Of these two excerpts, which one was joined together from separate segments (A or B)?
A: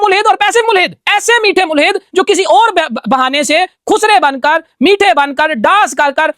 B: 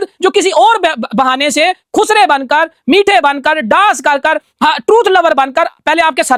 A